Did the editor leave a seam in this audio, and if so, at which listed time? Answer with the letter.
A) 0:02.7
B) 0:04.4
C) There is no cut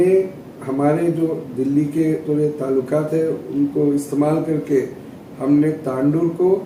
C